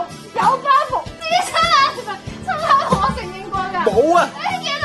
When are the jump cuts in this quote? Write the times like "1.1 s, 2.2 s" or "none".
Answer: 1.1 s